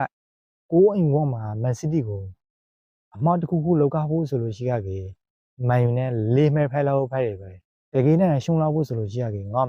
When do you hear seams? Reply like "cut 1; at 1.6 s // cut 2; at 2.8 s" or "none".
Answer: none